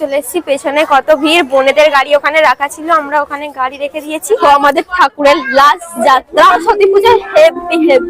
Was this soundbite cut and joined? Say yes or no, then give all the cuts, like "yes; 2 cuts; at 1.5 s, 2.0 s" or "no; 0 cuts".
yes; 2 cuts; at 4.4 s, 6.5 s